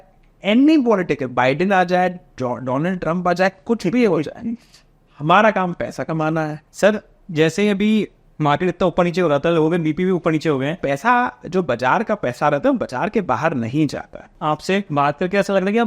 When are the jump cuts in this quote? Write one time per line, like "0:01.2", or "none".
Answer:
0:06.6
0:10.8
0:14.5